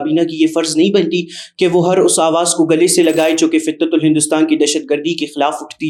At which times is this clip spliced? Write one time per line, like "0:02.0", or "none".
none

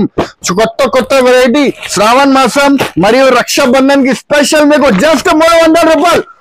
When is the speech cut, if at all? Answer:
none

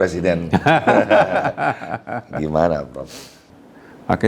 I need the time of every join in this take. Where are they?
0:03.3

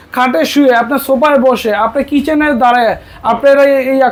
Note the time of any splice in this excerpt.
none

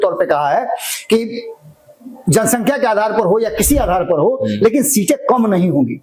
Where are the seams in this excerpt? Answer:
none

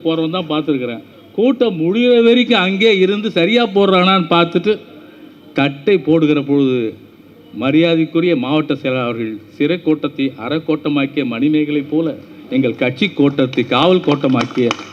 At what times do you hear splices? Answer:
none

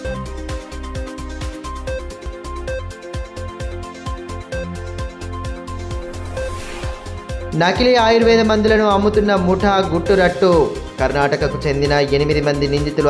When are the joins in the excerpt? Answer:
0:01.6

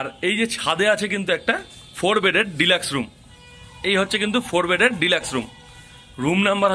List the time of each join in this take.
none

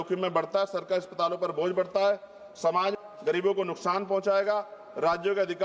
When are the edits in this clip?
0:03.0

